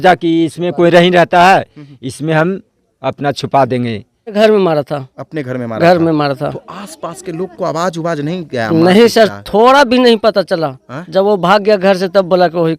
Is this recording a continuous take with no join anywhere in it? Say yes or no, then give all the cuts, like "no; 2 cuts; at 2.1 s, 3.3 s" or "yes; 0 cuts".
no; 1 cut; at 4.3 s